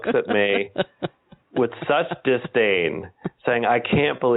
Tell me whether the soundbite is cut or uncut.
uncut